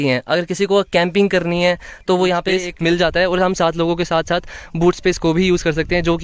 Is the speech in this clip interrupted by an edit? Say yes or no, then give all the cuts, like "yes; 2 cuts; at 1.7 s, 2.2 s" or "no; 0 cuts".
yes; 1 cut; at 2.6 s